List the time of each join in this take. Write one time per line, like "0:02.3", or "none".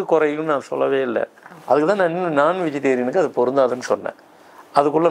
0:01.5